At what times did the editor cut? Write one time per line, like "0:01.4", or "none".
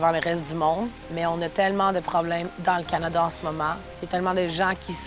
0:01.0
0:02.5
0:03.9